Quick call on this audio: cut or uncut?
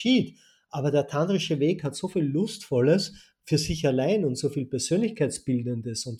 uncut